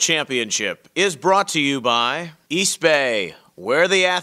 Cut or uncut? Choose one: cut